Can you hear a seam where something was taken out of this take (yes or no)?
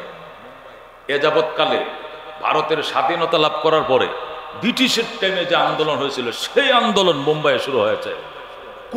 no